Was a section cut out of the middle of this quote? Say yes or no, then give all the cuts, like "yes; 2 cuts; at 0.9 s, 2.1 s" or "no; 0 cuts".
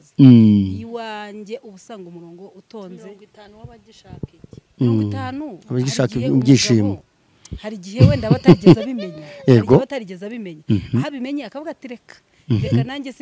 no; 0 cuts